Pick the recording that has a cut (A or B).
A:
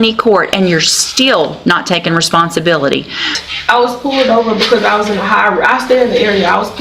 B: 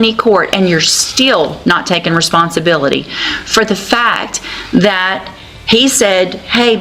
A